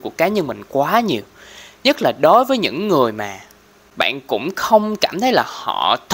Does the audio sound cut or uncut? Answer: uncut